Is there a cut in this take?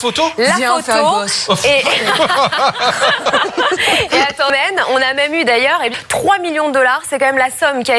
yes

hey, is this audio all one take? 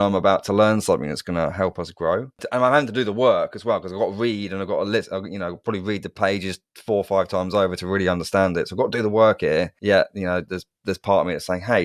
yes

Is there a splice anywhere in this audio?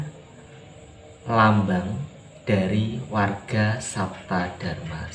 no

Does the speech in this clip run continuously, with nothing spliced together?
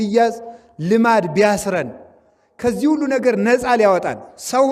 yes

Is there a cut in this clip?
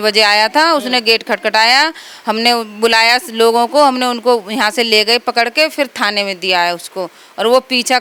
no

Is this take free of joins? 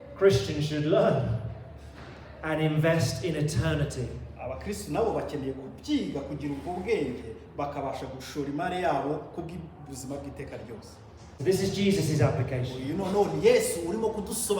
no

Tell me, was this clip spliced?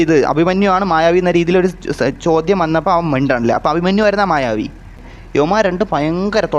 yes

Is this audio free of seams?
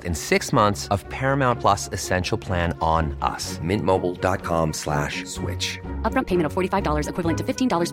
yes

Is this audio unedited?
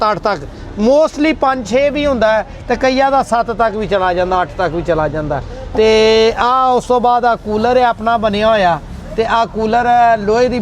yes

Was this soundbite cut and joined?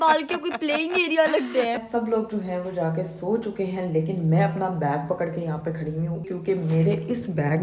yes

